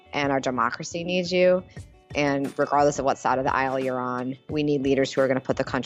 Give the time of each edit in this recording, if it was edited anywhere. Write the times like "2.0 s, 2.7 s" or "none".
none